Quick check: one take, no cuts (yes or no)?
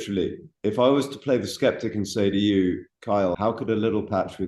yes